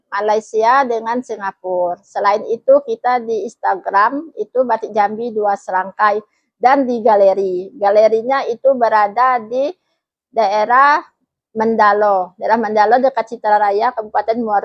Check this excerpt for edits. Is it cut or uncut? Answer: uncut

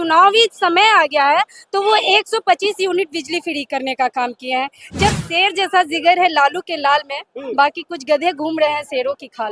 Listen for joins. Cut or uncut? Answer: cut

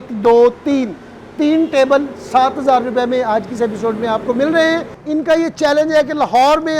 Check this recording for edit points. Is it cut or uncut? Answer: cut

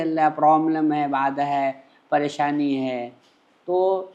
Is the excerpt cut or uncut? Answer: uncut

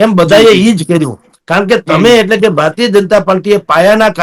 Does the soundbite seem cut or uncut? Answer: uncut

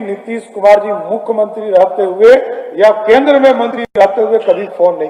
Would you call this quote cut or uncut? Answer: uncut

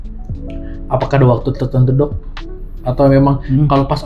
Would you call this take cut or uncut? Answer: uncut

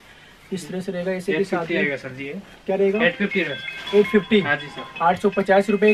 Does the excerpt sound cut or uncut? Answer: uncut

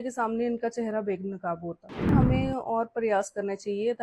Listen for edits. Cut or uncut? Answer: cut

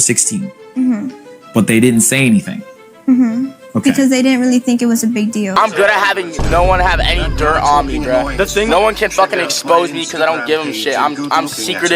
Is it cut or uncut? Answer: uncut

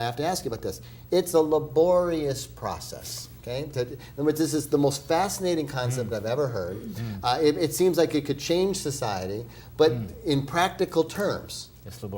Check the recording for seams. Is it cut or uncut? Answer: uncut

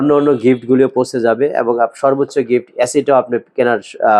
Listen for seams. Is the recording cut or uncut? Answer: uncut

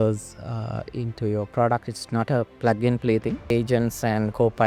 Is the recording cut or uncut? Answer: cut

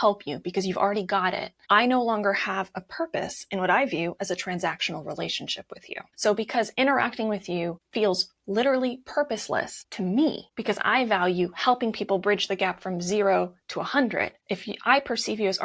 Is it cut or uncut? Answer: cut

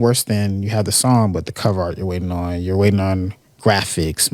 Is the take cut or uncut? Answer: uncut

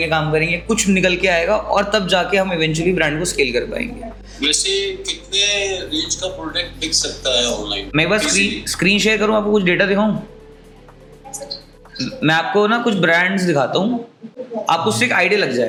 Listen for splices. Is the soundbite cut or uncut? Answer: uncut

